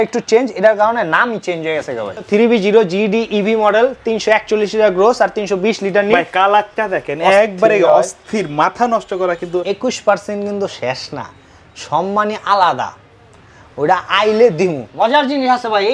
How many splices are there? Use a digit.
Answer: 3